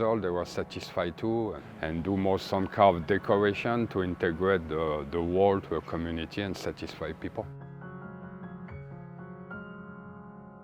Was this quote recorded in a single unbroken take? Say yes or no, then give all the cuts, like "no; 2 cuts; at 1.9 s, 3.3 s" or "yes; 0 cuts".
yes; 0 cuts